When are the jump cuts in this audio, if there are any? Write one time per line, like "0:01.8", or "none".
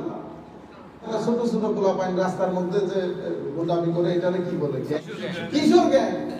0:01.1
0:05.0

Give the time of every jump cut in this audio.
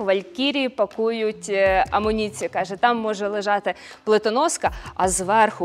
none

